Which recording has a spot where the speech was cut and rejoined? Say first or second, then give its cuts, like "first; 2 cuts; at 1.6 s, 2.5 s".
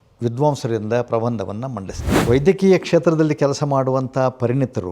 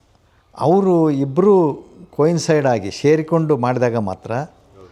first; 1 cut; at 2.0 s